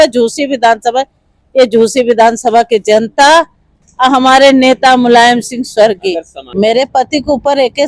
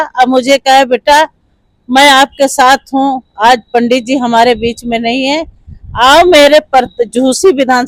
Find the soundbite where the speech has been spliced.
first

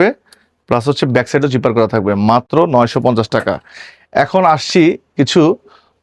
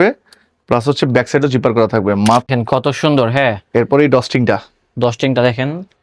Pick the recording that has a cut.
second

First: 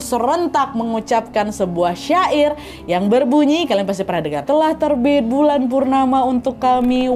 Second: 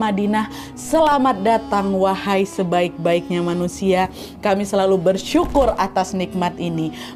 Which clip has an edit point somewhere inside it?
first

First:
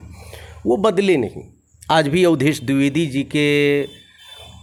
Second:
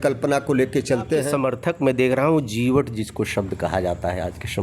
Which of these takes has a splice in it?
second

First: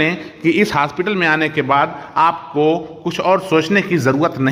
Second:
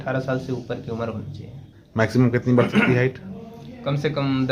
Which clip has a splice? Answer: second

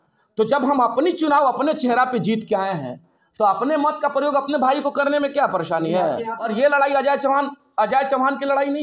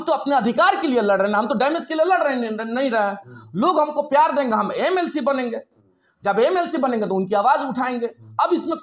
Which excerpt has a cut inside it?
first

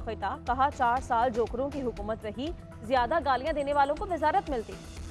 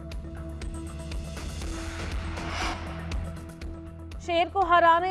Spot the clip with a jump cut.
second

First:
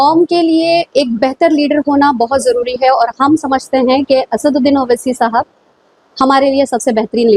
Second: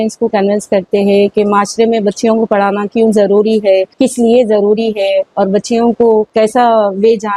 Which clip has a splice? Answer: second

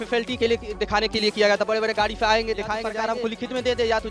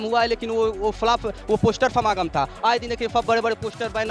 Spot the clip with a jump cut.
first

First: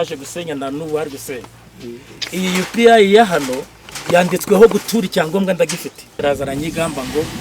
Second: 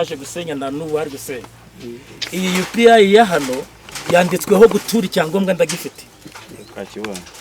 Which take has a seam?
first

